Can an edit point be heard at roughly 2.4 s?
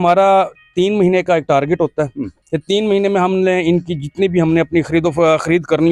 no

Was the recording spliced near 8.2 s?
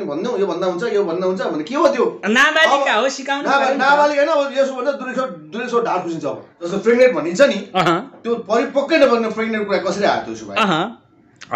no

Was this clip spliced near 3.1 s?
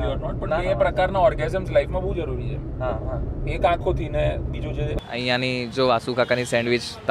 no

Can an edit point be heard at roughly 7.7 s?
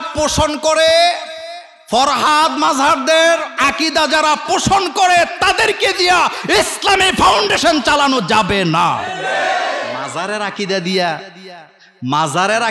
no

